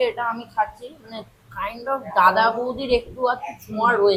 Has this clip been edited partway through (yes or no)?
no